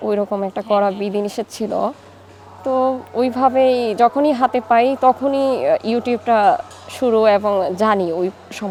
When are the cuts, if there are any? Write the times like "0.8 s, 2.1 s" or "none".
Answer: none